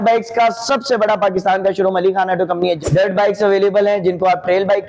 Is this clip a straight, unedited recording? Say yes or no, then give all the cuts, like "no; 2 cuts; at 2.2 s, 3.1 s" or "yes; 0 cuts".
no; 1 cut; at 2.8 s